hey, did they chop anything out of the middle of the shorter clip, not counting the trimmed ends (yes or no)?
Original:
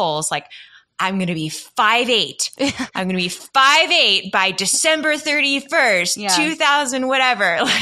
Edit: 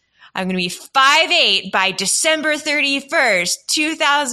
no